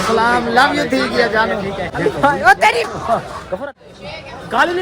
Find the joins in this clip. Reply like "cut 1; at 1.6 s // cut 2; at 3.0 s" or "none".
cut 1; at 1.9 s // cut 2; at 3.6 s